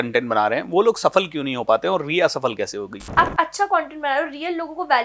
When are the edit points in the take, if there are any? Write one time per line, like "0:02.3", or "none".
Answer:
0:03.0